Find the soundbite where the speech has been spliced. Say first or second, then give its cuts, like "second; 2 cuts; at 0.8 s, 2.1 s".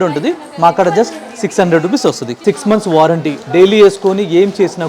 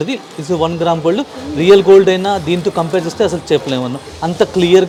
first; 1 cut; at 2.3 s